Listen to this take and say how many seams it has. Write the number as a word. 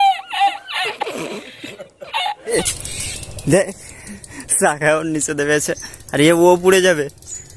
one